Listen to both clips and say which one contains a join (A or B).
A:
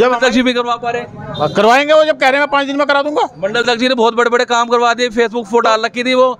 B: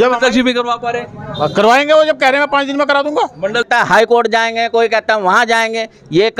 B